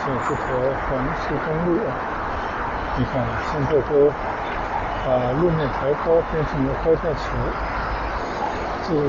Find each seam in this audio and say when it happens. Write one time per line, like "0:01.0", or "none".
0:08.2